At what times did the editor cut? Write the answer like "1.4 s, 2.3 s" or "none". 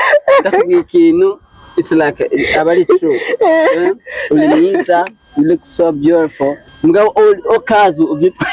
6.6 s